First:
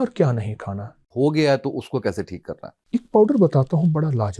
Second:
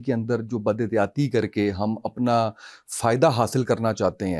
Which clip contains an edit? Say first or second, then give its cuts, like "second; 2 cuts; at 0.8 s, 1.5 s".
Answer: first; 1 cut; at 1.0 s